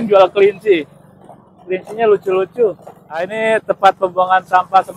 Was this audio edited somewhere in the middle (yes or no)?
yes